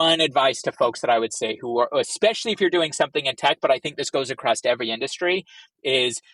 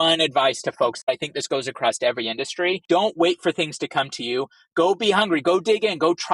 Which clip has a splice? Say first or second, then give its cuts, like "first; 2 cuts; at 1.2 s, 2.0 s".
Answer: second; 2 cuts; at 1.1 s, 2.8 s